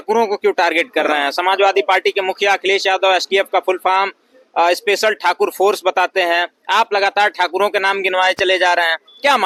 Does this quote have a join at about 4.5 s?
no; 0 cuts

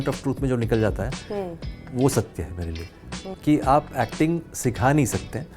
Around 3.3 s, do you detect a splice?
yes; 1 cut; at 3.3 s

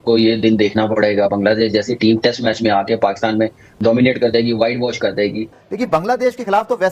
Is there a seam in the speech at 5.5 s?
yes; 1 cut; at 5.5 s

